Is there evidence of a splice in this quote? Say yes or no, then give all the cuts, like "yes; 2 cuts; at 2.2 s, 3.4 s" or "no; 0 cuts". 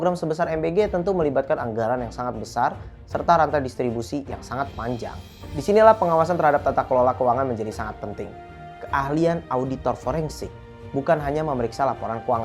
no; 0 cuts